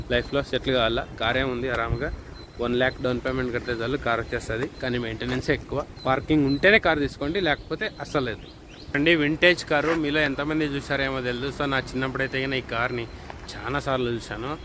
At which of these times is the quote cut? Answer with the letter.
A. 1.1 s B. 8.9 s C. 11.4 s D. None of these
B